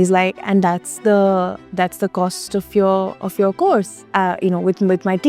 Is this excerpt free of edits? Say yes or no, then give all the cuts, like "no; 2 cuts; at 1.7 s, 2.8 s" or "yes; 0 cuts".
yes; 0 cuts